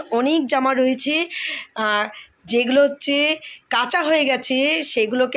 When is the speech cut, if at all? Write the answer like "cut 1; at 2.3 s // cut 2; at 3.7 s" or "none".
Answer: none

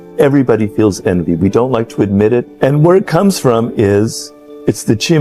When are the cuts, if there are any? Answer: none

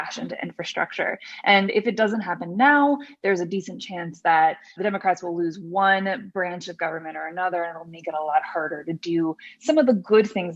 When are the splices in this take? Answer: none

